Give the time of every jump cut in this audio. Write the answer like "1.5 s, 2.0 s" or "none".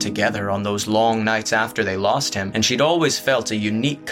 2.4 s